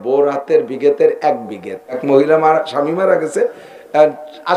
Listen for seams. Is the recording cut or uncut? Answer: cut